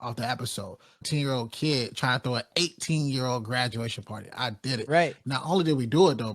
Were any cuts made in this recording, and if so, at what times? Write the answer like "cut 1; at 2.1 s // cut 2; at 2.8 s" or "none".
cut 1; at 1.0 s